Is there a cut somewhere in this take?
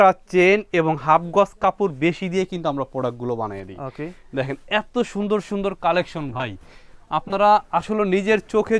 no; 0 cuts

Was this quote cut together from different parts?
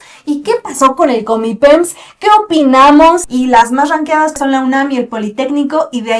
yes; 2 cuts; at 3.3 s, 4.4 s

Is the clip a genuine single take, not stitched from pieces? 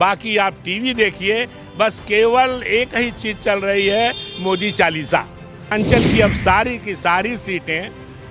no; 1 cut; at 5.7 s

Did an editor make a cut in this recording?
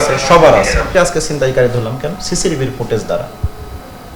yes; 1 cut; at 0.9 s

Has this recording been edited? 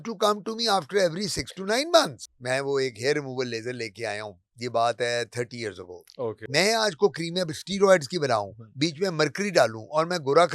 yes; 2 cuts; at 2.2 s, 6.5 s

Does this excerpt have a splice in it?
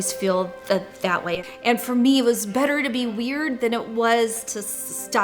yes; 1 cut; at 1.2 s

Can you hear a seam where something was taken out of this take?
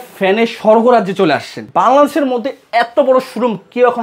yes; 1 cut; at 1.7 s

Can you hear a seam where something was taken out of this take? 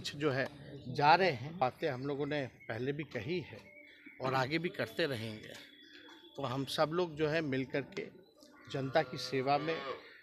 yes; 1 cut; at 1.6 s

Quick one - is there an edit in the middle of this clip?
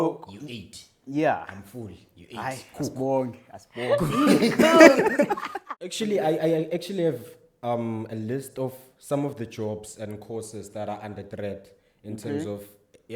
yes; 1 cut; at 5.5 s

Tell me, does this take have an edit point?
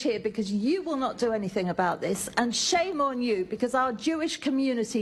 no; 0 cuts

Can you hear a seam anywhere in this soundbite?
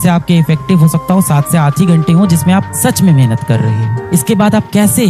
no; 0 cuts

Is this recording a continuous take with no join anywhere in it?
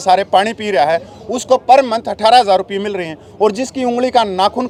yes; 0 cuts

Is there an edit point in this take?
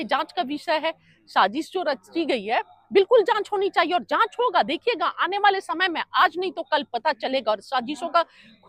no; 0 cuts

